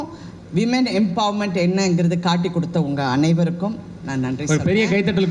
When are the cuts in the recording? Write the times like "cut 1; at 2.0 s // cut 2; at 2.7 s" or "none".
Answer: none